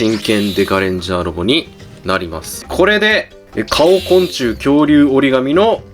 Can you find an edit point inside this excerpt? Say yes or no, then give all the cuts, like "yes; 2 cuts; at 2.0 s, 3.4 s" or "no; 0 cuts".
yes; 1 cut; at 2.7 s